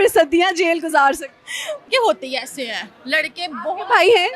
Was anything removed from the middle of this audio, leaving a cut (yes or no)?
yes